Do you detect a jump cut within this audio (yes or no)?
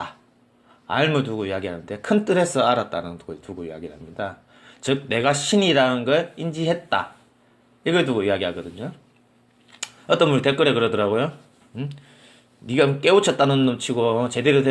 yes